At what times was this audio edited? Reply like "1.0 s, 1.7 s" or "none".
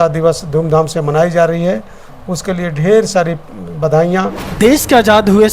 4.4 s